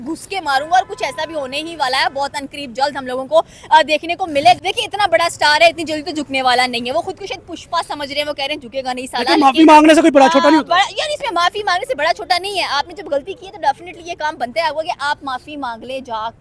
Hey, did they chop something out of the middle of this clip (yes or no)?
yes